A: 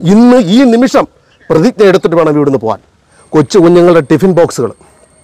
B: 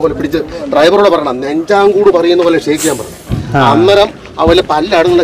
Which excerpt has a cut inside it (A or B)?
A